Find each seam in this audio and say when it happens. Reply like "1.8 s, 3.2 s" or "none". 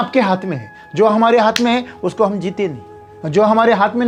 none